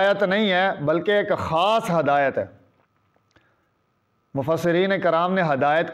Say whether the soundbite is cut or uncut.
uncut